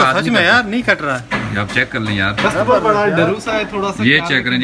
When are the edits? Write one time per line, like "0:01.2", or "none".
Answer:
none